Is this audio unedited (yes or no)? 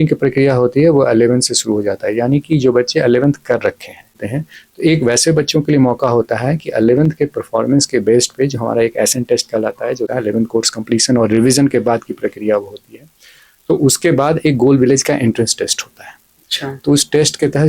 no